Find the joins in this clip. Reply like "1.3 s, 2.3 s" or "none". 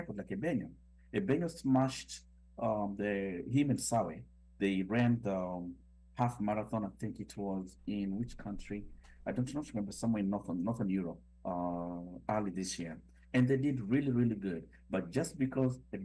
none